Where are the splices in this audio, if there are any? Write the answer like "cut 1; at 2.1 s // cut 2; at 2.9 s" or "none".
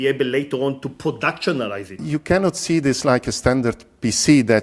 cut 1; at 2.0 s